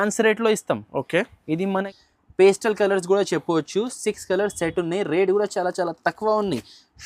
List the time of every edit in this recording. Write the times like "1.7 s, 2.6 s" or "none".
2.0 s

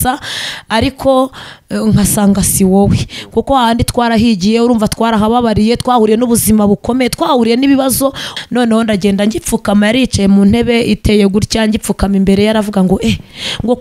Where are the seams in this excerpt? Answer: 8.3 s

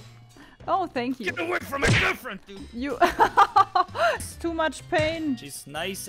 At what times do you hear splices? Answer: 4.2 s

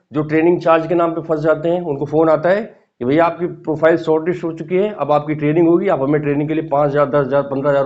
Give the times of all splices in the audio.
none

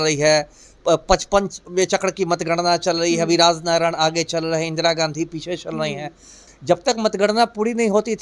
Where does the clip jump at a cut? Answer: 6.4 s

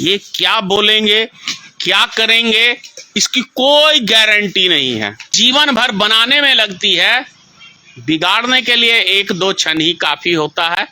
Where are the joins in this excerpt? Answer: 5.3 s

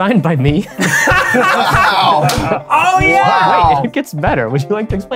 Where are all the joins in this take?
3.8 s

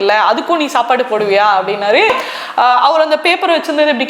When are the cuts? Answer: 2.1 s

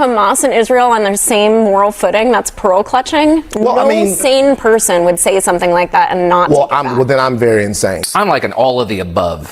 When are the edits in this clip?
2.9 s, 8.0 s

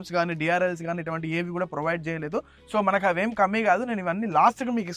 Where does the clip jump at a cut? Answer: none

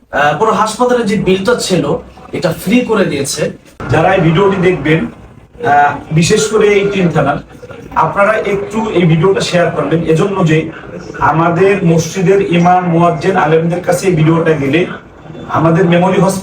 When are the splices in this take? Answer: 3.7 s

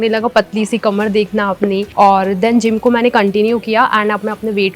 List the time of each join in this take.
1.9 s

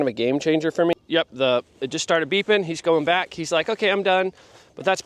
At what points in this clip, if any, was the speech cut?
0.9 s

